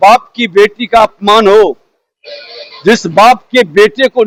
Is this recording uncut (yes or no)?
yes